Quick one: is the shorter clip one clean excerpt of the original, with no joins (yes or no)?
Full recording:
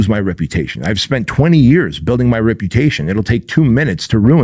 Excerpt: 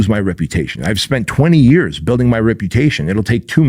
yes